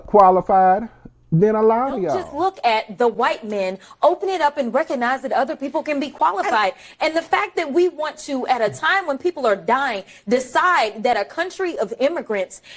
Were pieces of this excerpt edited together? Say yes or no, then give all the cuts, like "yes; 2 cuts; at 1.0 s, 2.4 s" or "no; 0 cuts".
yes; 1 cut; at 2.2 s